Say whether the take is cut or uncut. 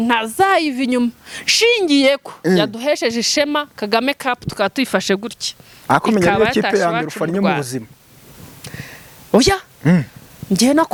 uncut